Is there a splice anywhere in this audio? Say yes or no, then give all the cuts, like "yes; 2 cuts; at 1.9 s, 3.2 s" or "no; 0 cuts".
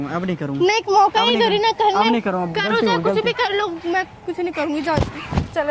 no; 0 cuts